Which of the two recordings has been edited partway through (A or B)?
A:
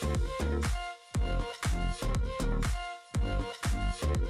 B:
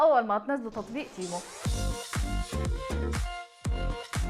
B